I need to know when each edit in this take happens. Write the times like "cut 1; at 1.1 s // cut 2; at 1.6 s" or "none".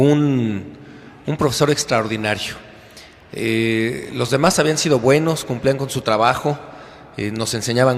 cut 1; at 5.9 s

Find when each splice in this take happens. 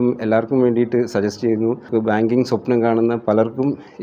cut 1; at 1.8 s

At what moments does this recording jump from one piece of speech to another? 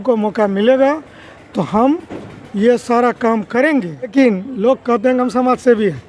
cut 1; at 4.1 s

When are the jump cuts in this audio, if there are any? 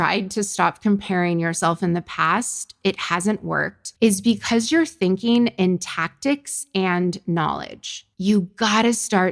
none

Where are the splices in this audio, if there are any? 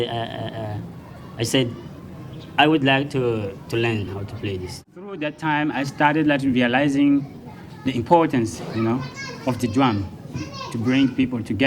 cut 1; at 5.1 s

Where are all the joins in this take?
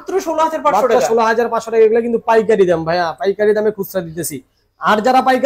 none

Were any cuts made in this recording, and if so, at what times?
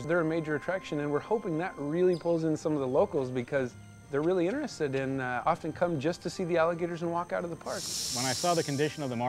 cut 1; at 8.0 s

